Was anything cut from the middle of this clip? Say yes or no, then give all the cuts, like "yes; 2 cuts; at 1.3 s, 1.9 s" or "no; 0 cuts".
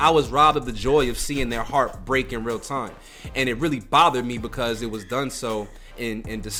no; 0 cuts